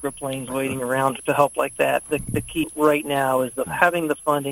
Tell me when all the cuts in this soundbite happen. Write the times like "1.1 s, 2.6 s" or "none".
1.2 s, 2.3 s